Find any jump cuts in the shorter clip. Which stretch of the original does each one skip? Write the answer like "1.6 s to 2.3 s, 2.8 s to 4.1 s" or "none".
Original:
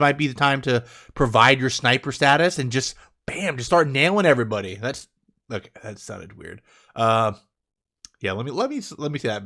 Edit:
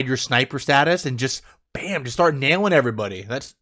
none